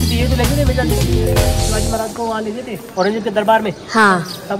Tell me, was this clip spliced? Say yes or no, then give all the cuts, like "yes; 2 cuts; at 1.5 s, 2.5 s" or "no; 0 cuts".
no; 0 cuts